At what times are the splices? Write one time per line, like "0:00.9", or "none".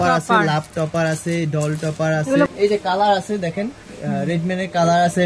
0:02.5